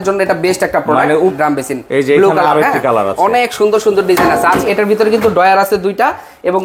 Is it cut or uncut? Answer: cut